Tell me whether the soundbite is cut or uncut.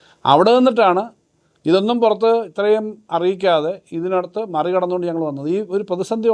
uncut